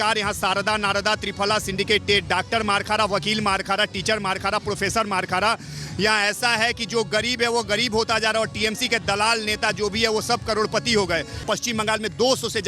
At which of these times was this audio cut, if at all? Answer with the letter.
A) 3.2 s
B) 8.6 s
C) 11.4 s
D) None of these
C